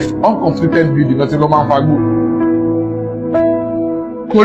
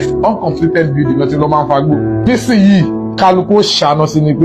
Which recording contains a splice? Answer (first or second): second